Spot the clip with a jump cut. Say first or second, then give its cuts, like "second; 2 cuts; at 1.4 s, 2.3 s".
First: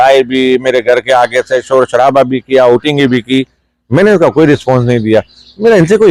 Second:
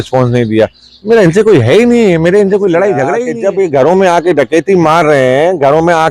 second; 1 cut; at 3.2 s